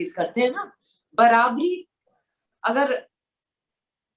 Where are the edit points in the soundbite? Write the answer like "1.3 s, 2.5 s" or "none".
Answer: 3.2 s